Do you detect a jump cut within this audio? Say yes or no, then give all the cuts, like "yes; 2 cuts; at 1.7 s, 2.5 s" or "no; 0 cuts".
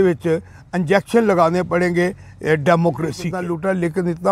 yes; 1 cut; at 3.3 s